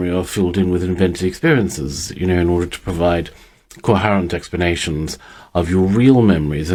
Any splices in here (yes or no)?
no